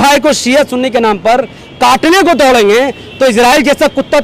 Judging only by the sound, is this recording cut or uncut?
uncut